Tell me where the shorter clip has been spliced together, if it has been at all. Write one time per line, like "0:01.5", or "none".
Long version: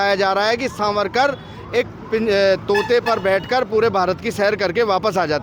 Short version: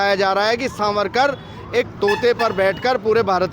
0:01.9